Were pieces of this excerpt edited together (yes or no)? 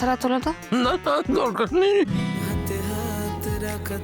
yes